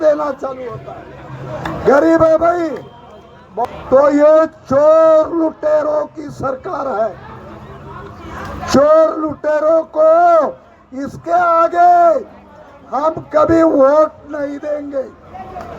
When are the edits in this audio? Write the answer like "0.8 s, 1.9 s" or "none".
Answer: 3.6 s